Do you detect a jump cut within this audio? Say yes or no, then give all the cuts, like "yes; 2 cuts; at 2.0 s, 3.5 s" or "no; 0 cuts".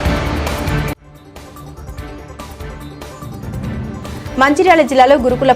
yes; 3 cuts; at 2.3 s, 3.0 s, 4.1 s